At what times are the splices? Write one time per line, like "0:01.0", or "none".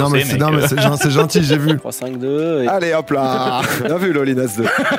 0:01.9